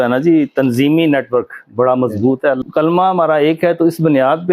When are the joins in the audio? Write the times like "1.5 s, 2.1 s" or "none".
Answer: 2.6 s